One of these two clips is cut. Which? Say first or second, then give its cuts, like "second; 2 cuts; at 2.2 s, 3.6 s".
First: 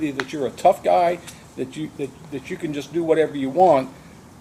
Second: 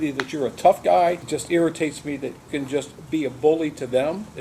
second; 2 cuts; at 1.2 s, 2.4 s